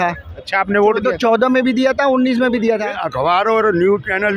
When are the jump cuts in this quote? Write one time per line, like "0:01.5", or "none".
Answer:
0:03.0